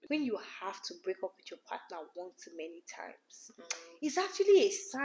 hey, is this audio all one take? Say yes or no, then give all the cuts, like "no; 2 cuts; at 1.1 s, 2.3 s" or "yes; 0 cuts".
yes; 0 cuts